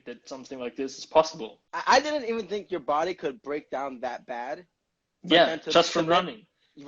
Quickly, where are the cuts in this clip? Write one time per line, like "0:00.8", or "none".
0:01.8